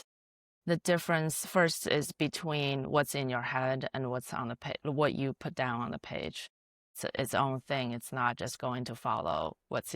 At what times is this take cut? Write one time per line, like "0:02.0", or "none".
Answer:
0:06.8